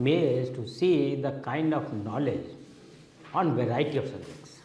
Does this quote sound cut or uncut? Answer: uncut